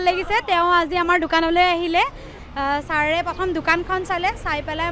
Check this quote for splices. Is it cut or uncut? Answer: cut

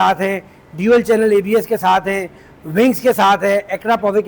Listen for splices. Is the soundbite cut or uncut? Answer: uncut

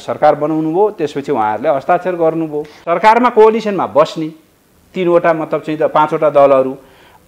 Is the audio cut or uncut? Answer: cut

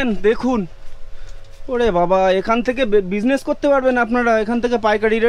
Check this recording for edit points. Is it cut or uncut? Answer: uncut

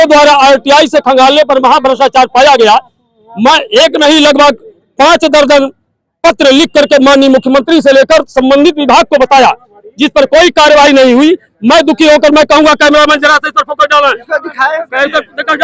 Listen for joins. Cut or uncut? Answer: uncut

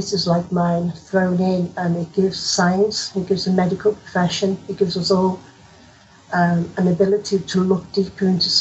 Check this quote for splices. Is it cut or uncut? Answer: uncut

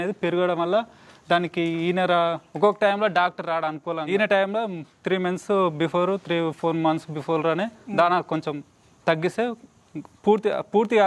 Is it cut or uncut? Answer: cut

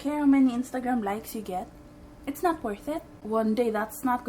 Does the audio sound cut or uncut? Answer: cut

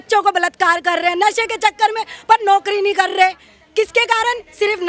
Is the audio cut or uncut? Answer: uncut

